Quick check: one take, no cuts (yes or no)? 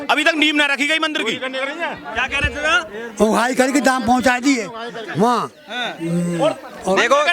yes